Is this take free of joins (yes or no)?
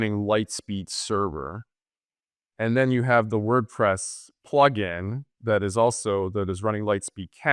yes